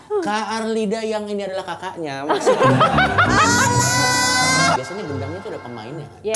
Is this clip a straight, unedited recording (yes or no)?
no